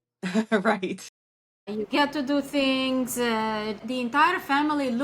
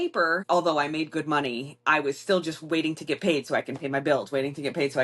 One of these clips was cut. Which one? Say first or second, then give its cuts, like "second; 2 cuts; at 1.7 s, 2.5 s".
first; 1 cut; at 3.8 s